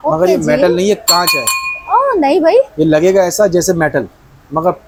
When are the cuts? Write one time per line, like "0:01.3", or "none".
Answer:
none